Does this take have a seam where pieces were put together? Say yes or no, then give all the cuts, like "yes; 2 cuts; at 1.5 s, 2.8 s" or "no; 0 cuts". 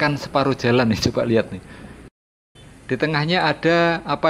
yes; 1 cut; at 2.5 s